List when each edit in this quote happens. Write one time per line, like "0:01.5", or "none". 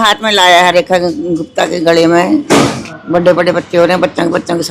0:02.9